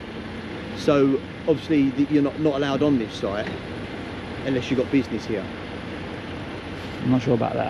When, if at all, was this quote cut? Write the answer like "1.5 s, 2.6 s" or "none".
none